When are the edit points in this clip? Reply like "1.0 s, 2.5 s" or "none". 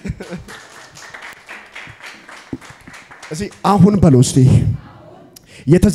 none

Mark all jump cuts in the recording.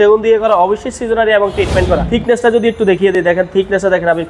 2.0 s

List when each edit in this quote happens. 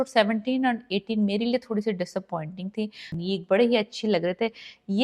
3.1 s

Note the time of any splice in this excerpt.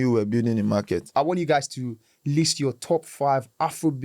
1.1 s

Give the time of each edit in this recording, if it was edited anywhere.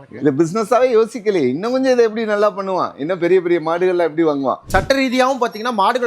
4.6 s

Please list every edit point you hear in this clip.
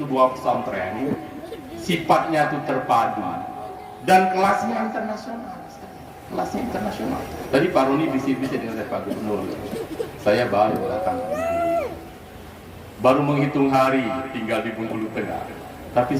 none

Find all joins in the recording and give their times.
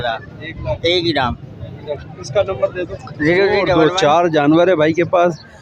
3.7 s

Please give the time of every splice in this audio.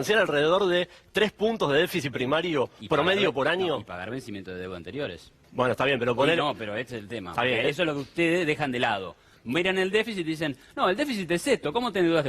none

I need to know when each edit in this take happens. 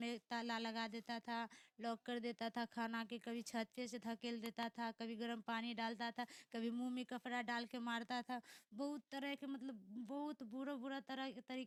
none

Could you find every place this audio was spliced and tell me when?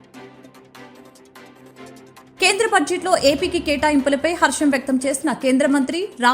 1.5 s

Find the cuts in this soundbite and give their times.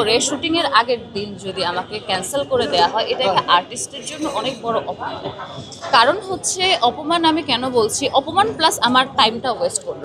none

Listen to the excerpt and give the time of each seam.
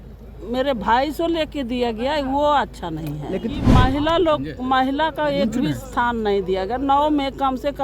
3.7 s

